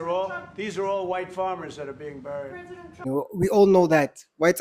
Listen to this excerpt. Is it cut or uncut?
cut